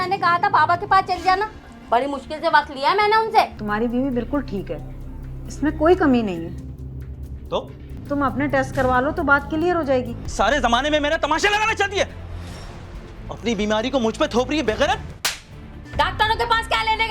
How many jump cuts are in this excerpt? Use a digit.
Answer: 4